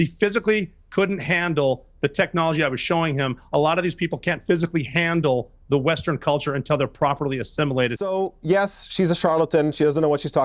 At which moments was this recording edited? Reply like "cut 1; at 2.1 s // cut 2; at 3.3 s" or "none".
cut 1; at 8.0 s

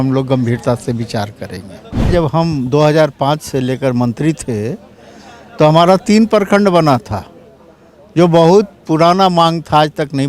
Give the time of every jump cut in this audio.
cut 1; at 2.1 s

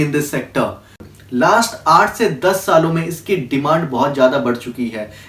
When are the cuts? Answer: cut 1; at 1.1 s

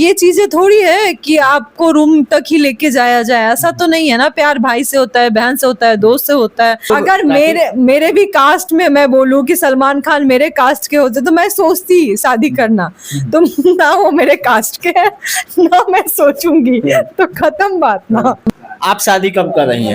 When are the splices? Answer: cut 1; at 6.9 s // cut 2; at 18.5 s

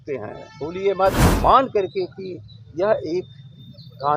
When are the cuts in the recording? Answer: cut 1; at 1.3 s

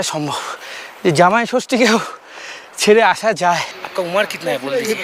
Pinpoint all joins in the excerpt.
cut 1; at 3.8 s

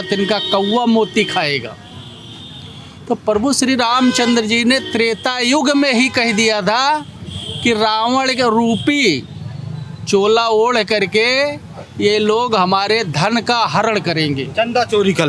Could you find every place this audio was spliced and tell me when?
none

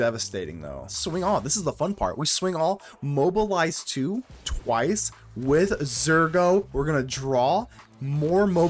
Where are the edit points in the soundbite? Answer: cut 1; at 1.0 s

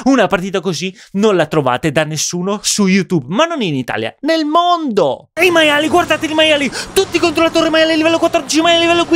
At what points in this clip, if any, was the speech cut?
cut 1; at 5.3 s

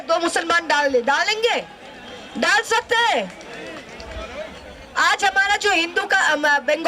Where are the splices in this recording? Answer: none

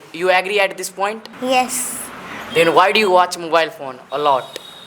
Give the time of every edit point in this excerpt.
cut 1; at 1.3 s

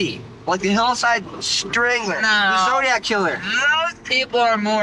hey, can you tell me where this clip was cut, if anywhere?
none

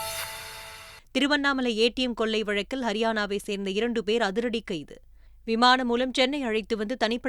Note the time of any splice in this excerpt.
cut 1; at 0.9 s

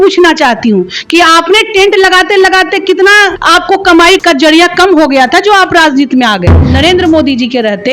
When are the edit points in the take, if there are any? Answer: cut 1; at 3.4 s // cut 2; at 4.2 s // cut 3; at 6.7 s

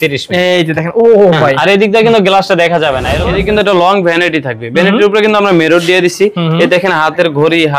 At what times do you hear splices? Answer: cut 1; at 3.2 s

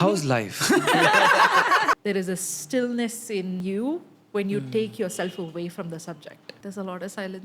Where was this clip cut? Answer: cut 1; at 2.0 s // cut 2; at 3.6 s // cut 3; at 6.6 s

